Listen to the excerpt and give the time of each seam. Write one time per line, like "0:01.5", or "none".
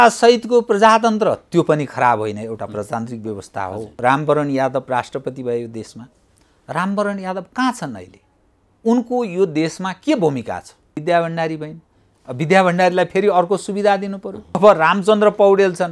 0:03.8
0:11.0
0:14.6